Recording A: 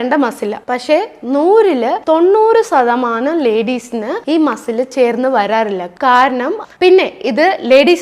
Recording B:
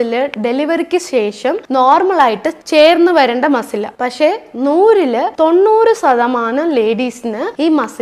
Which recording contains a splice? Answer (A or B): A